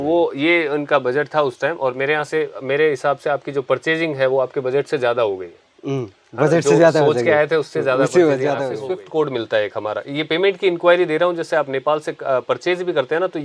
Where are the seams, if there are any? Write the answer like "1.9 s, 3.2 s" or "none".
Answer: 8.7 s